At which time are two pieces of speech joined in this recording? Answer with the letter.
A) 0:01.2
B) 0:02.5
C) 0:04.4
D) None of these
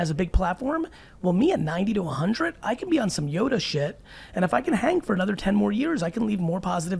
D